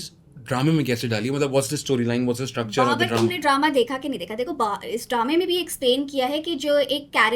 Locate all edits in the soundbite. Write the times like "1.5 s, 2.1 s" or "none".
none